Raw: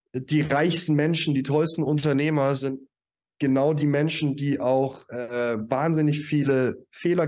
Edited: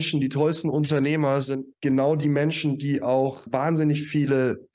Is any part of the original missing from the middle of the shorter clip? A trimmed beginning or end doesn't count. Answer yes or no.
yes